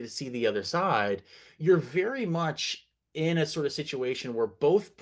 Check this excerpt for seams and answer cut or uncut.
uncut